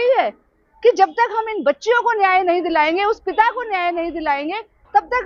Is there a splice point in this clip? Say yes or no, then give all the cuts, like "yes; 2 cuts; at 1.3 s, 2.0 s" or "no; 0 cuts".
no; 0 cuts